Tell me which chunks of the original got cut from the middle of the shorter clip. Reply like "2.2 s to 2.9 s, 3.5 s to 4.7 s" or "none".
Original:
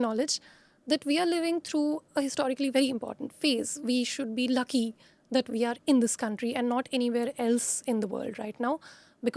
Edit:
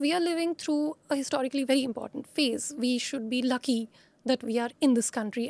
none